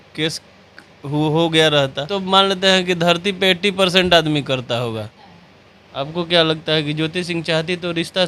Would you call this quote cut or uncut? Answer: cut